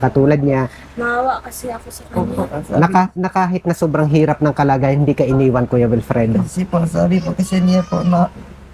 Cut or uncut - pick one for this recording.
uncut